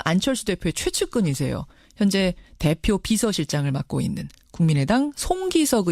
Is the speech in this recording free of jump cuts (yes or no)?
yes